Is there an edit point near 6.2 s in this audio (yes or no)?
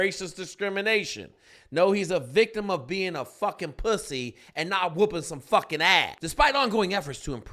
yes